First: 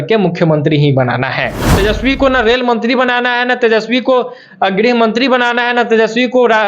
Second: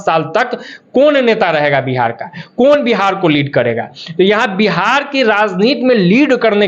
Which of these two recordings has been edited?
first; 1 cut; at 1.6 s

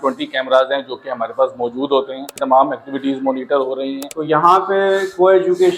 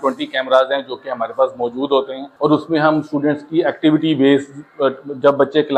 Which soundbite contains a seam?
first; 2 cuts; at 2.4 s, 4.1 s

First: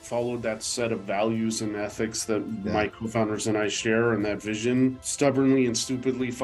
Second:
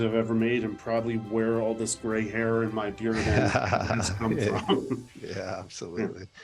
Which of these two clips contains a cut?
first; 1 cut; at 5.0 s

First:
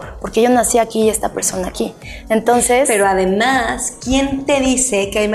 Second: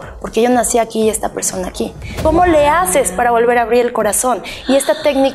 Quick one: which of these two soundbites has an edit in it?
second; 1 cut; at 2.2 s

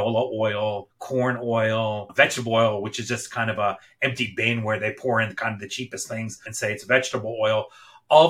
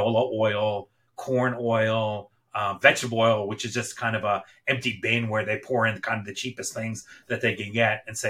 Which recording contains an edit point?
first; 3 cuts; at 0.9 s, 2.1 s, 6.5 s

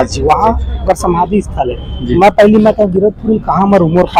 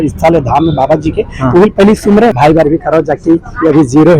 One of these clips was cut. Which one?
second; 1 cut; at 2.4 s

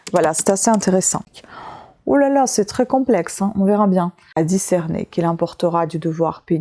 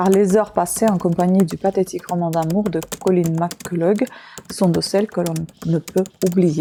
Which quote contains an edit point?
first; 2 cuts; at 1.2 s, 4.2 s

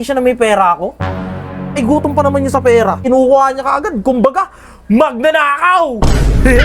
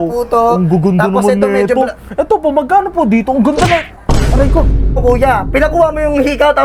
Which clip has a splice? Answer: first; 1 cut; at 3.0 s

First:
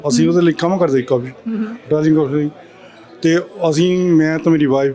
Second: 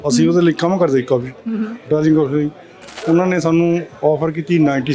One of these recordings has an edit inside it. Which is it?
second; 1 cut; at 3.0 s

